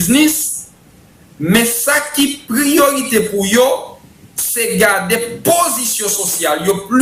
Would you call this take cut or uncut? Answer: uncut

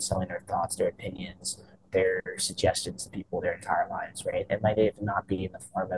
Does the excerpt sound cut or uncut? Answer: uncut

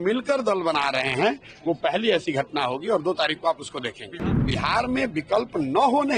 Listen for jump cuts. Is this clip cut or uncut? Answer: cut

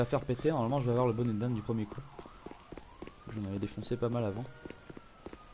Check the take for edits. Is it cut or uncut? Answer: uncut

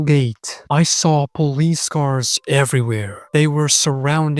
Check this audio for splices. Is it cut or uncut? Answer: uncut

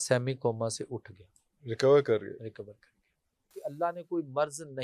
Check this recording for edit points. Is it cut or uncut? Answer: cut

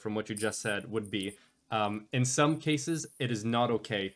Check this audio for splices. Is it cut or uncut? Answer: uncut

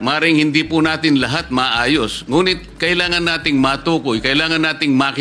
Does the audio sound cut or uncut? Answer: uncut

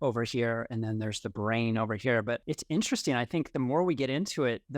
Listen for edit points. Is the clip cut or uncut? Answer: cut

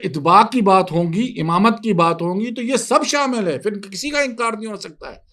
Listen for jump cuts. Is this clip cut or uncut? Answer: uncut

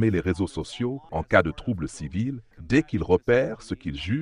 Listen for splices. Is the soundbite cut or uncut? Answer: cut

